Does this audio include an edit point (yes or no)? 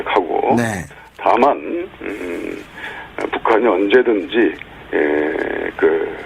yes